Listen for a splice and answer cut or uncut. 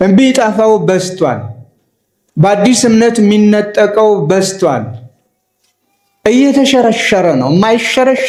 uncut